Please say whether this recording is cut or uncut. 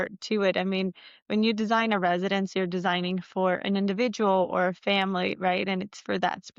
uncut